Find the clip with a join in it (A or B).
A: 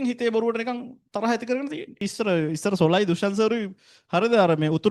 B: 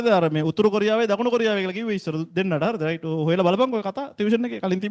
A